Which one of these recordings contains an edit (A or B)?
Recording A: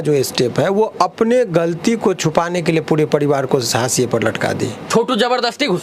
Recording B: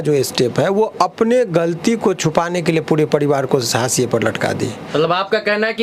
A